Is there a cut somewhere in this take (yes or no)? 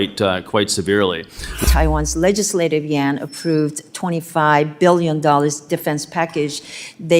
yes